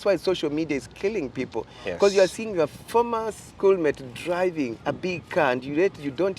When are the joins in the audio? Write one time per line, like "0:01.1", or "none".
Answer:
0:04.8